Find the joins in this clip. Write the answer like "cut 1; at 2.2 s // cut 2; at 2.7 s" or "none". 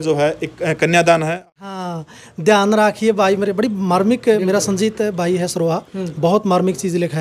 cut 1; at 1.4 s